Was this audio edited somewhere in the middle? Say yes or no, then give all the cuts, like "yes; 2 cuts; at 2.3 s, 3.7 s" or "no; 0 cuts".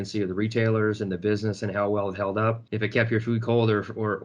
yes; 1 cut; at 2.7 s